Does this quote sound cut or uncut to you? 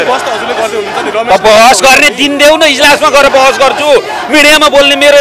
uncut